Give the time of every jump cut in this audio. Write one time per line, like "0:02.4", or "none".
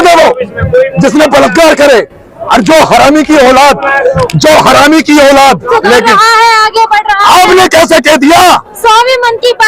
0:05.7